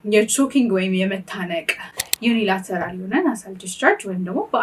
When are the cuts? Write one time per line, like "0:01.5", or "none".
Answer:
0:02.0